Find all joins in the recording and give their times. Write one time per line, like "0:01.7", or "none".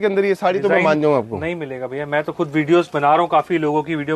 none